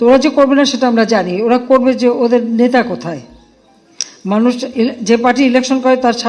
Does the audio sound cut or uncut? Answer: uncut